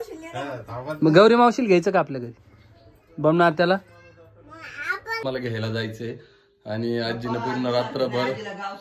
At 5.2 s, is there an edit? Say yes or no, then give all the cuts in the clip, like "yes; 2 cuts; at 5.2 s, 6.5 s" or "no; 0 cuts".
yes; 1 cut; at 5.2 s